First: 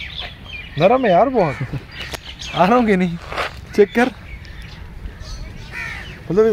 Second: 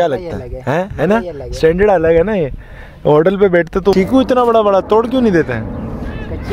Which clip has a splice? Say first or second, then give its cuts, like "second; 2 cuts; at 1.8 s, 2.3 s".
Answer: second; 1 cut; at 3.9 s